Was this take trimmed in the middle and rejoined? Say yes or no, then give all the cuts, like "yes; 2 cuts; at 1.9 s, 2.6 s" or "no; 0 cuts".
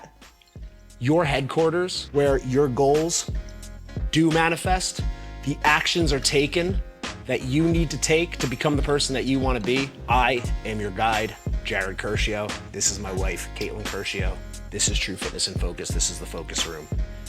no; 0 cuts